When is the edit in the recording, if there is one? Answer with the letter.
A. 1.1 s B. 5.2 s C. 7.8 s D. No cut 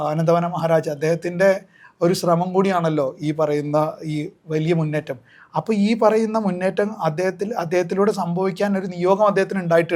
D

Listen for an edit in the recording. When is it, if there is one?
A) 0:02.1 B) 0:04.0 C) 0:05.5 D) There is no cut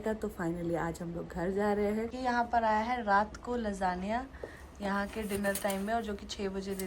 A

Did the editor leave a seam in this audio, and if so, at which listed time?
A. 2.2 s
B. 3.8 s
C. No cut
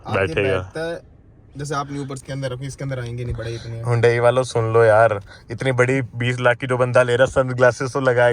A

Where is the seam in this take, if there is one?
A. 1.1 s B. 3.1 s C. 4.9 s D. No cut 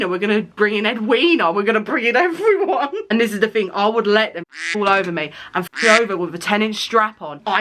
B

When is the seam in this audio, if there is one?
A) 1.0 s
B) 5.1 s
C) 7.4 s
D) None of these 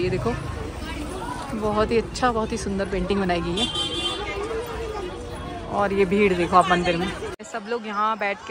C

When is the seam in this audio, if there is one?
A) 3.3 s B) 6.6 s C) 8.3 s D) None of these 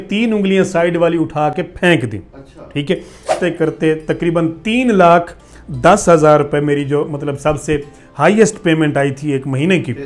A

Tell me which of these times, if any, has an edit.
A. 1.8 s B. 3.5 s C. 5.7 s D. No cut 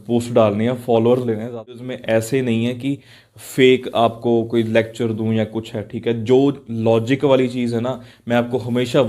A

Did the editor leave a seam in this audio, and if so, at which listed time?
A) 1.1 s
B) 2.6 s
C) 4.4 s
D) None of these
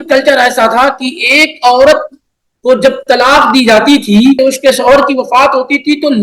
C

